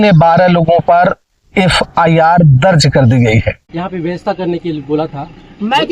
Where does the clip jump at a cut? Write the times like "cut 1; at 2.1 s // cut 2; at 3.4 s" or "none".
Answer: cut 1; at 3.6 s